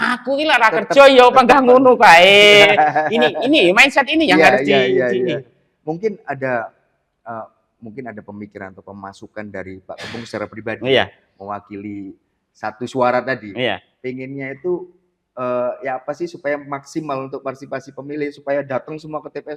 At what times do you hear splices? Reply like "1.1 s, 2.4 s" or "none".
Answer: none